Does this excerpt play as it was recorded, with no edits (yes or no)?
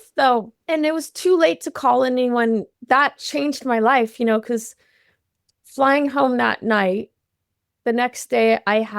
no